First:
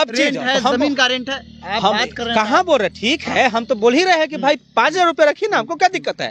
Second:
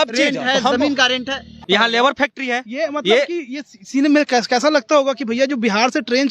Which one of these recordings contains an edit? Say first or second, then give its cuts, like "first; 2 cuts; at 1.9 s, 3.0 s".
second; 1 cut; at 1.6 s